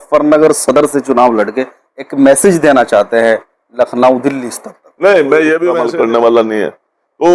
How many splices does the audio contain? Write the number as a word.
one